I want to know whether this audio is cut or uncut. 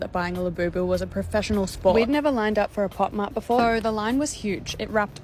cut